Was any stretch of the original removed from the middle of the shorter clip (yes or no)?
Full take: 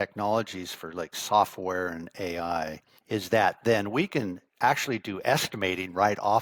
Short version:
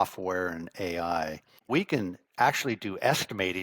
yes